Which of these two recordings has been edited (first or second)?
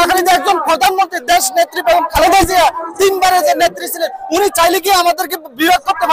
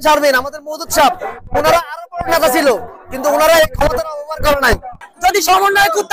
second